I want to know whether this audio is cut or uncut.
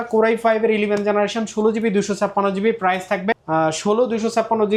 uncut